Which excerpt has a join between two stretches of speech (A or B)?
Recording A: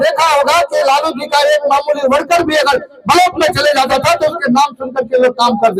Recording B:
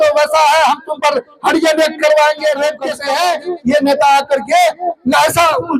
B